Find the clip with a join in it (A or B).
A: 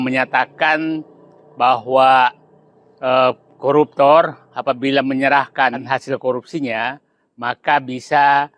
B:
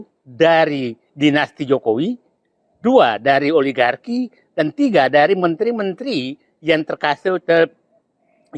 A